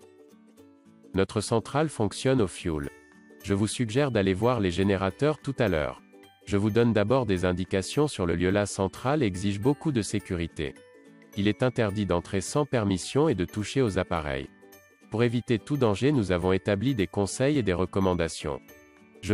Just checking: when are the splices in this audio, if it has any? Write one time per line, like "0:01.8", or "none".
0:01.1